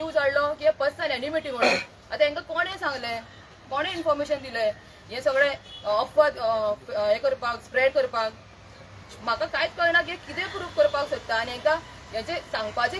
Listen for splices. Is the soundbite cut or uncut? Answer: uncut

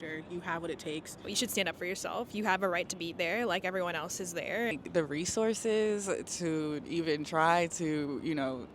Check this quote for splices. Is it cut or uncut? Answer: cut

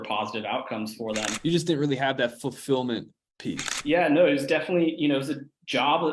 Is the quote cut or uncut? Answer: cut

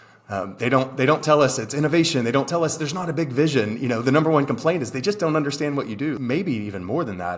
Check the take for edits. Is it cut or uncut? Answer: cut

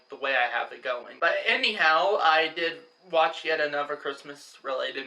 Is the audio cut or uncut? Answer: cut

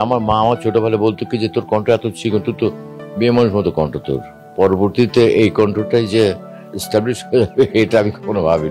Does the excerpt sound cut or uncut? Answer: cut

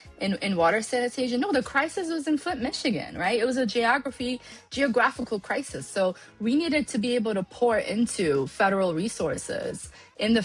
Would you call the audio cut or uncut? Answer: uncut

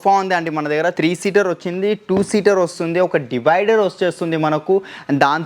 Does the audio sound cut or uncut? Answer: cut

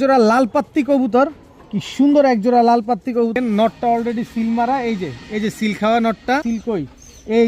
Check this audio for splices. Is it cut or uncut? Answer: cut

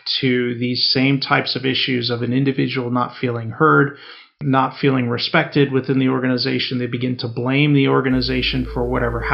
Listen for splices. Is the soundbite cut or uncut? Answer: cut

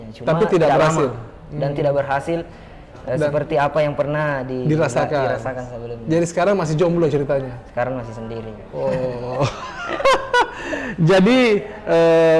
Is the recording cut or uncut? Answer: uncut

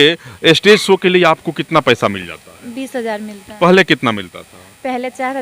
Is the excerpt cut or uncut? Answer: uncut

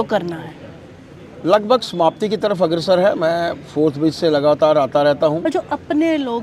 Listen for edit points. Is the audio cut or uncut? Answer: cut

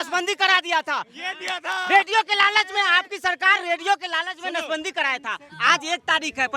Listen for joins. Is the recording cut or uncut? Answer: uncut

